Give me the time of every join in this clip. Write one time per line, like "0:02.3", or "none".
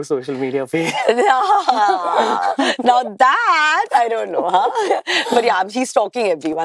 none